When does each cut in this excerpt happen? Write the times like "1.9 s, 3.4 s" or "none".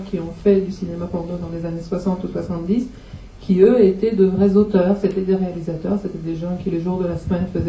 2.4 s

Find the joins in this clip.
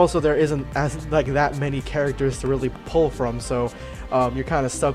3.9 s

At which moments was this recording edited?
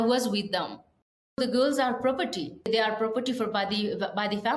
1.4 s, 2.7 s

